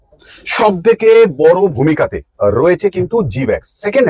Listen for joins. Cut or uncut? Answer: uncut